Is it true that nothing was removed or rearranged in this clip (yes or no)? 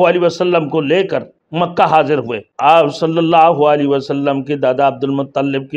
no